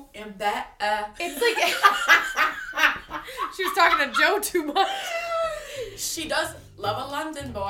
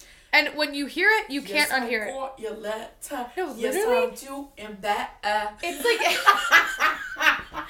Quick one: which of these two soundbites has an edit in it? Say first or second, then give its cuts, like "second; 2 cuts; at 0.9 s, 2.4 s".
first; 1 cut; at 6.6 s